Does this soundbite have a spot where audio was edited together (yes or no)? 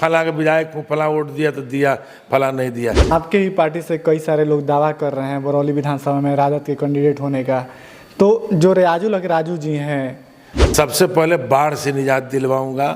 yes